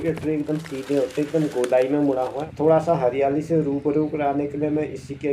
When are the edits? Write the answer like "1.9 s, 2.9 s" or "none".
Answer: 2.4 s

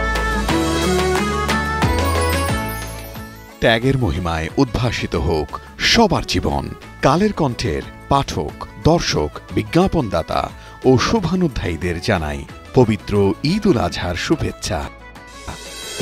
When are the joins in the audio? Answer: none

